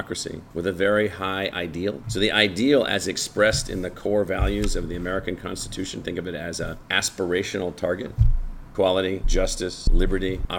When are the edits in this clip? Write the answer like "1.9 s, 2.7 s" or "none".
none